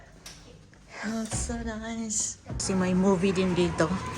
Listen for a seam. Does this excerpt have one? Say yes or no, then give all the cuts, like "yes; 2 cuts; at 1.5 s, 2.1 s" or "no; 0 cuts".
yes; 1 cut; at 2.6 s